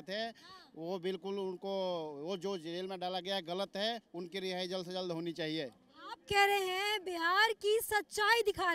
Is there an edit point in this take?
no; 0 cuts

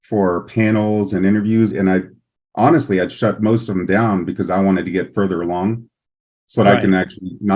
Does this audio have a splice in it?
yes; 1 cut; at 1.7 s

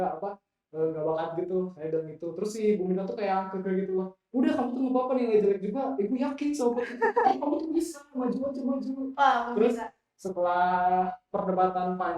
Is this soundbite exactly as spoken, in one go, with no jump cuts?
no; 1 cut; at 10.5 s

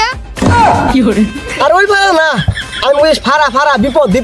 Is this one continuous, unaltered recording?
yes; 0 cuts

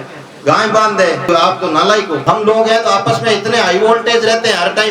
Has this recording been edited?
yes; 2 cuts; at 1.3 s, 2.2 s

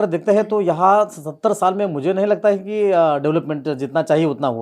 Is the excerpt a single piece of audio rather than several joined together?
yes; 0 cuts

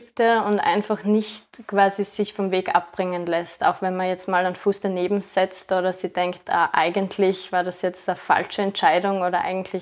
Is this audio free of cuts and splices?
yes; 0 cuts

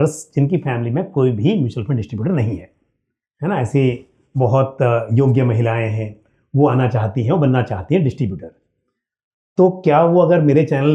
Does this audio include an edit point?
no; 0 cuts

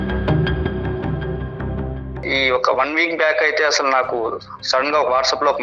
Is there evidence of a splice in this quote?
yes; 1 cut; at 2.2 s

